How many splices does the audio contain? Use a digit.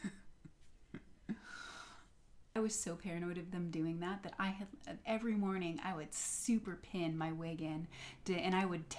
1